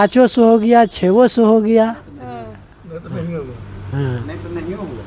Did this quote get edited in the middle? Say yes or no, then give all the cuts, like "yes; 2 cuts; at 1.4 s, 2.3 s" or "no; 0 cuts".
no; 0 cuts